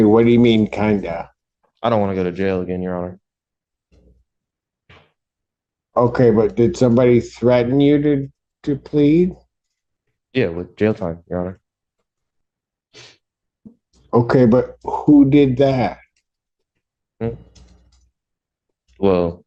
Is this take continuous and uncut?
yes; 0 cuts

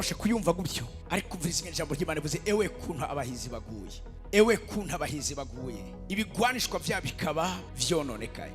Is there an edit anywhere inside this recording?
yes; 1 cut; at 5.9 s

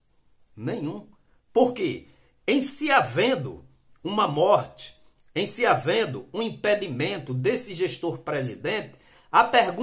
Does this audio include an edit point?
no; 0 cuts

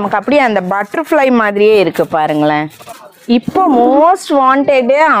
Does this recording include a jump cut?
no; 0 cuts

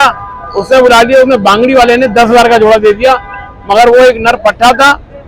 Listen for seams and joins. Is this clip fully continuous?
yes; 0 cuts

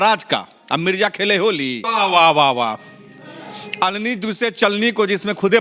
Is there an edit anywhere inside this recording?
yes; 1 cut; at 1.9 s

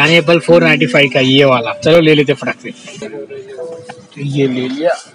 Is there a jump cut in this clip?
no; 0 cuts

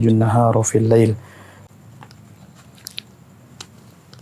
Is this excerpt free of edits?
no; 1 cut; at 1.6 s

